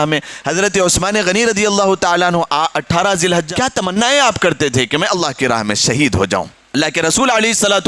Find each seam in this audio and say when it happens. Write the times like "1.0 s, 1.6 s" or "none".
3.8 s, 6.6 s